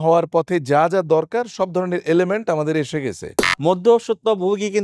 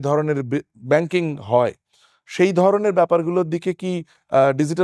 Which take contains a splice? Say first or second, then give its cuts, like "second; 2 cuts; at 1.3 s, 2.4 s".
first; 1 cut; at 3.3 s